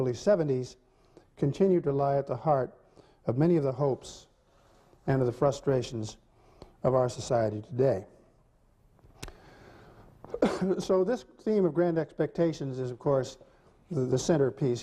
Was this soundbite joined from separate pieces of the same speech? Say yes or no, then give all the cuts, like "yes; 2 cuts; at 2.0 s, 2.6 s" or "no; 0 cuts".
no; 0 cuts